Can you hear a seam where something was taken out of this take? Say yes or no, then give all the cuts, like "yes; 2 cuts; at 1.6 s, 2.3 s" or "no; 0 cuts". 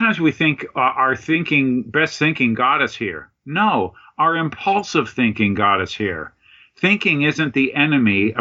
no; 0 cuts